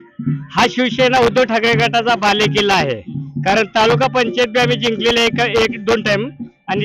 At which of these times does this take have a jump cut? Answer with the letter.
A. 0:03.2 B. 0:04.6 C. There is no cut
C